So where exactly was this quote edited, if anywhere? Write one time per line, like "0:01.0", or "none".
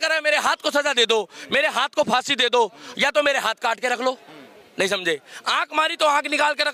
none